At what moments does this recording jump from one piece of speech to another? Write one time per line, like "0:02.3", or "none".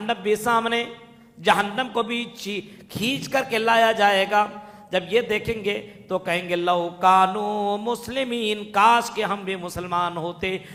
none